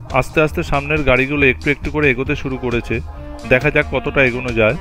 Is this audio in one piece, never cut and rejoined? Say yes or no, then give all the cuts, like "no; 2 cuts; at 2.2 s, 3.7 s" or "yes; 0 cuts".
yes; 0 cuts